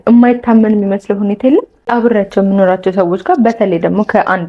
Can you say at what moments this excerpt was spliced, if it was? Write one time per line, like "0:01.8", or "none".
0:01.9